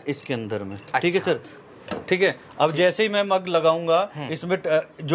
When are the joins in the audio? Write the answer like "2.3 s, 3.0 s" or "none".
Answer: none